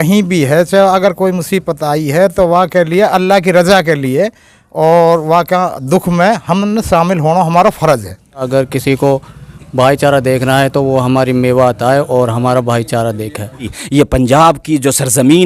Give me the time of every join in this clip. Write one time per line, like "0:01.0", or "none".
0:08.5
0:13.8

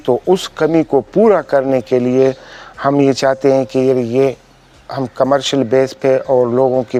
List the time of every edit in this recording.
none

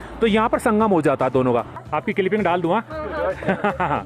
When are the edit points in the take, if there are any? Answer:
0:01.7

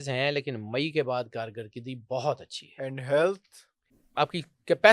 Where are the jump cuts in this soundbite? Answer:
0:03.9

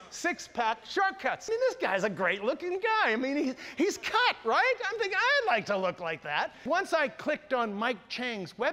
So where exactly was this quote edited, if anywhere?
0:01.4
0:06.6

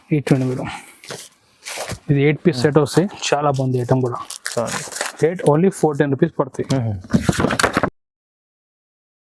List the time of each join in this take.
none

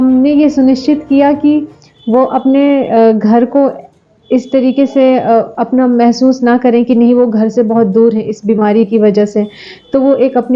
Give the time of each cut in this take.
none

